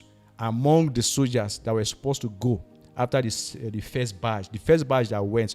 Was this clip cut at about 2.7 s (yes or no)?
no